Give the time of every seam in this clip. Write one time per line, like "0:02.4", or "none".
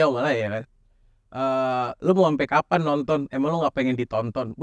none

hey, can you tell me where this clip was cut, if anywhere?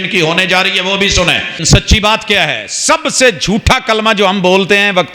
0:01.6

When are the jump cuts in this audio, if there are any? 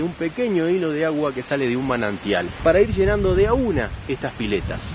0:02.5

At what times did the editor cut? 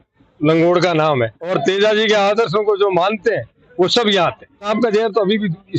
0:01.4
0:04.7

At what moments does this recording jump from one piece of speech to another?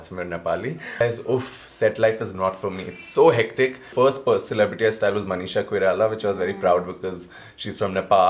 0:01.0
0:03.8

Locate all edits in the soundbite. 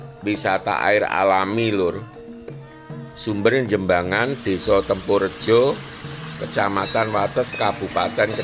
none

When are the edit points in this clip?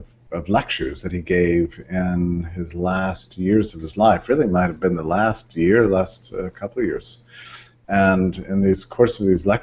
0:06.3

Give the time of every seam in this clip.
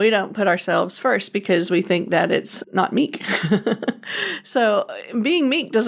0:02.5

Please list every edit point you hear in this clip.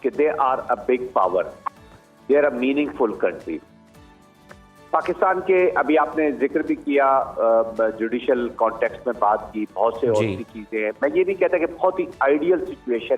none

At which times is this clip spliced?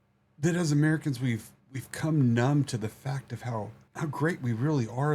0:03.8

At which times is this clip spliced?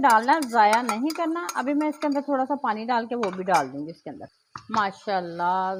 none

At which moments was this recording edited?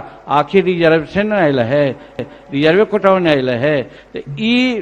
none

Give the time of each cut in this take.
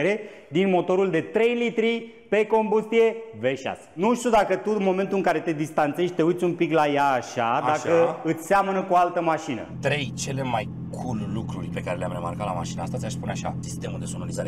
0:04.0
0:09.6
0:11.7
0:13.6

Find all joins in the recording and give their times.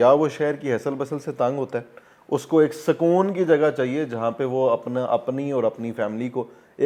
none

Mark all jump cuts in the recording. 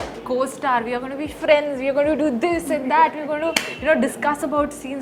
none

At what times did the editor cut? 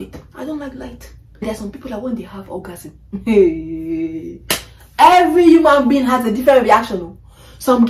0:01.4

